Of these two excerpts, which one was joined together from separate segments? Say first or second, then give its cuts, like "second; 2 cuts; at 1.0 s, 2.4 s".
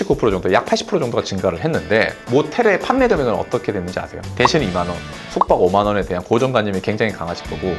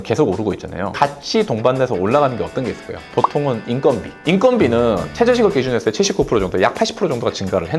second; 2 cuts; at 0.9 s, 4.1 s